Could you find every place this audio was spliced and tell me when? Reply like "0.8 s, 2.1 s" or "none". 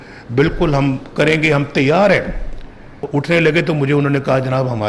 3.0 s

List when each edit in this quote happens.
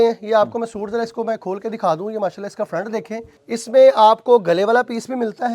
none

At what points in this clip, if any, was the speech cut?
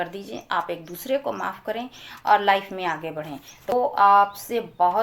3.7 s

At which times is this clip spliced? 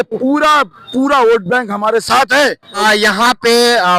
2.8 s

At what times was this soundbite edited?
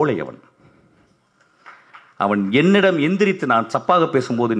none

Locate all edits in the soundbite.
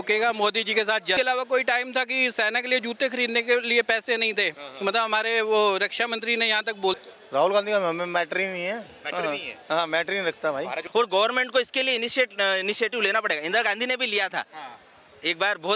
1.2 s, 7.0 s, 10.8 s

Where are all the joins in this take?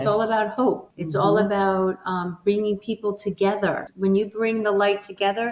0.9 s, 3.9 s

